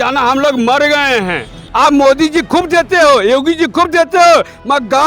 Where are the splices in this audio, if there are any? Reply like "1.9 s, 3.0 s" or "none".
1.7 s